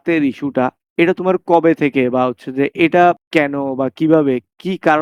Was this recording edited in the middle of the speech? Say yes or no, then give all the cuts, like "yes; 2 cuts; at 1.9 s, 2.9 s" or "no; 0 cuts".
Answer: no; 0 cuts